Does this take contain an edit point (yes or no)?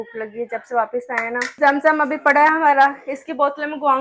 yes